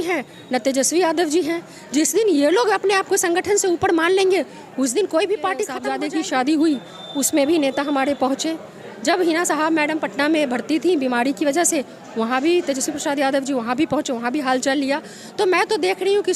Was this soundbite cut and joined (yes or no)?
yes